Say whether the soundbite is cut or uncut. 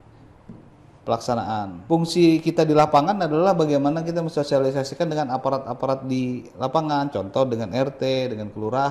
cut